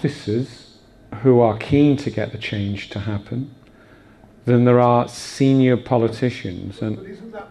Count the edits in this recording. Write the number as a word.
one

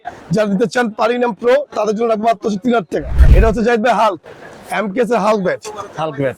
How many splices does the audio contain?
one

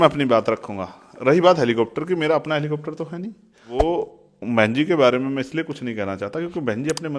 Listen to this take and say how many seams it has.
one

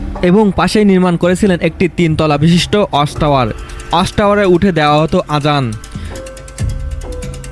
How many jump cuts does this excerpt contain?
one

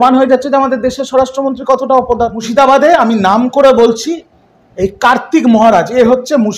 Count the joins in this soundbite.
one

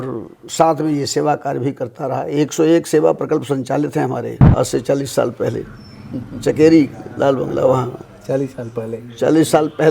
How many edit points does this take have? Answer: one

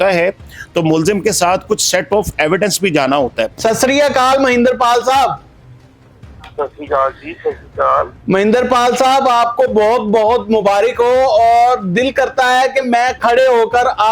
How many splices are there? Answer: one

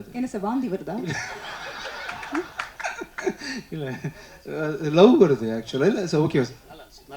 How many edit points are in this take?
zero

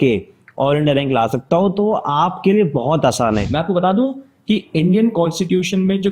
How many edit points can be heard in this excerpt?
one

